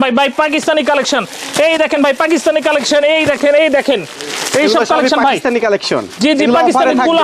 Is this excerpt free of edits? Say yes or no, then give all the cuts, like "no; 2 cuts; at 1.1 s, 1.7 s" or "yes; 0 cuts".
yes; 0 cuts